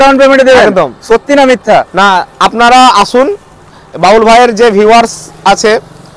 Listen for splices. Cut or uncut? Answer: uncut